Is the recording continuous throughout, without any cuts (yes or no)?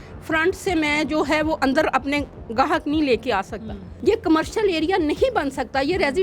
no